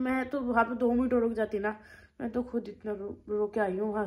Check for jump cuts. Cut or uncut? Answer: uncut